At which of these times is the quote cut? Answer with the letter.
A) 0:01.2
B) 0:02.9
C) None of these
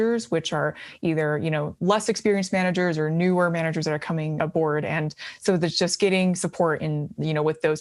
C